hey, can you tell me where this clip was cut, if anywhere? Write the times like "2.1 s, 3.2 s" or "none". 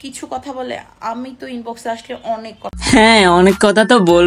2.7 s